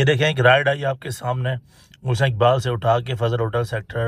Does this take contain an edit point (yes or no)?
no